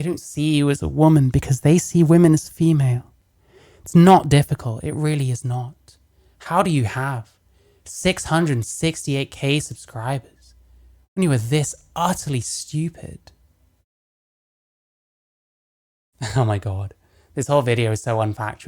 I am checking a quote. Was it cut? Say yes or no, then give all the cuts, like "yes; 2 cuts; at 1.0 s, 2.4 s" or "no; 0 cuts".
no; 0 cuts